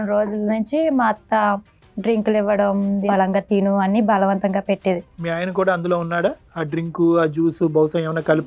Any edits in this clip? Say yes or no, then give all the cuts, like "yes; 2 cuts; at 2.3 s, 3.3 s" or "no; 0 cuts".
yes; 2 cuts; at 3.0 s, 5.1 s